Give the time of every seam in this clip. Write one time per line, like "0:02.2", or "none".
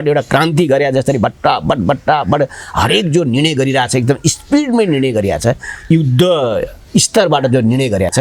none